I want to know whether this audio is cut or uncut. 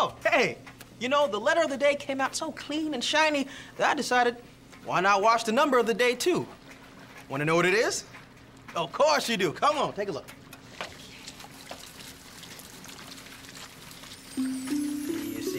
cut